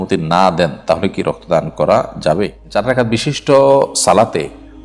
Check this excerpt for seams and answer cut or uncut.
cut